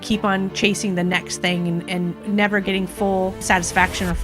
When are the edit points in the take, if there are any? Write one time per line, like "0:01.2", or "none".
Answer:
0:02.2
0:03.4

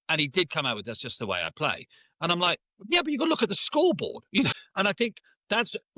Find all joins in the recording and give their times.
0:04.5

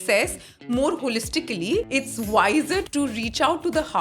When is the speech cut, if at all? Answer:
0:01.9
0:02.8

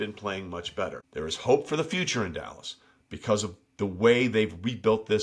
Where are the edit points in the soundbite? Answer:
0:01.0

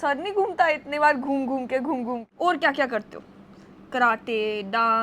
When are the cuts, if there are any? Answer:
0:02.3

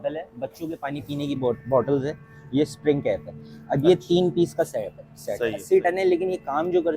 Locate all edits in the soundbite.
0:05.6

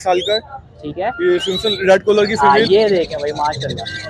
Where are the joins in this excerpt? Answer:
0:02.3

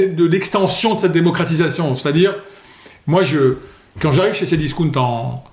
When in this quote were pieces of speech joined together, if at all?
none

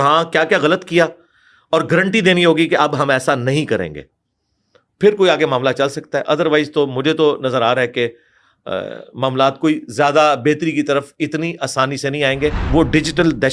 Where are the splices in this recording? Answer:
0:12.6

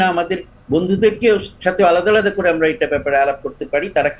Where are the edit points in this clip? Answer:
none

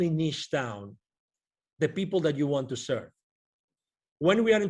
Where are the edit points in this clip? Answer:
none

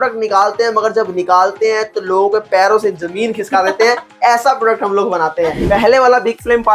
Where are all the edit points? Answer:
0:05.6

